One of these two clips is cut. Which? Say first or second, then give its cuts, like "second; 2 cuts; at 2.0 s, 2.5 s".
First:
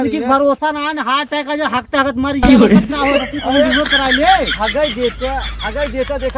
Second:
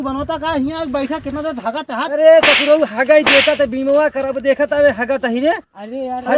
first; 2 cuts; at 2.4 s, 3.3 s